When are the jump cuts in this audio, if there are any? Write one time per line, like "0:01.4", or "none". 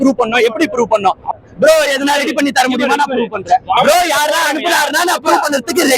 0:01.3
0:03.8